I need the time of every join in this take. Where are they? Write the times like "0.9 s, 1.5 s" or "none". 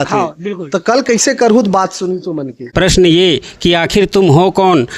2.6 s